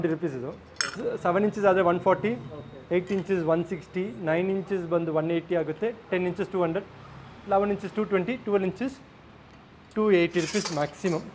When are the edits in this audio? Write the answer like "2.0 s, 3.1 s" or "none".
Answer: 0.9 s